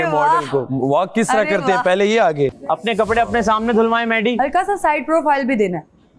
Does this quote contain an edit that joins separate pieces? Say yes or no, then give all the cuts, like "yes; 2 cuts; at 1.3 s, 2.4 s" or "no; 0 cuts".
no; 0 cuts